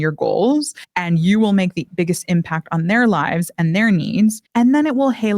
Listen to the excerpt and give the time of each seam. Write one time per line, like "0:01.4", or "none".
0:04.4